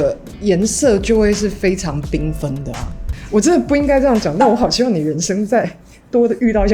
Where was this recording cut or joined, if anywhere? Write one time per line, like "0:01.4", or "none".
0:03.2